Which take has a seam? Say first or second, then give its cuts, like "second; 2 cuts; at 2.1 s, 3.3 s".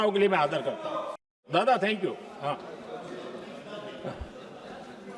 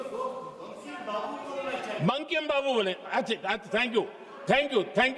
first; 1 cut; at 1.4 s